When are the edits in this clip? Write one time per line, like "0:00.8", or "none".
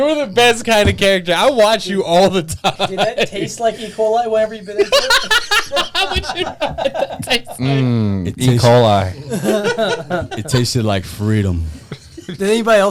none